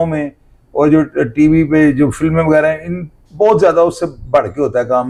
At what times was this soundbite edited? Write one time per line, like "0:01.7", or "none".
none